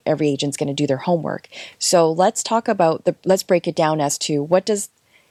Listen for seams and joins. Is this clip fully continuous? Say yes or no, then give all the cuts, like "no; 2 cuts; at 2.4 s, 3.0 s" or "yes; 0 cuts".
yes; 0 cuts